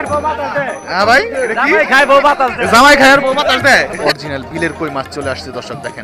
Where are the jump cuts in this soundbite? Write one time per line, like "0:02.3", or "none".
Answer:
0:03.9